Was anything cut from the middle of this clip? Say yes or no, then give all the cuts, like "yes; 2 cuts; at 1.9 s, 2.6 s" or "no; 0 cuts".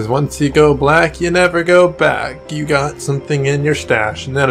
no; 0 cuts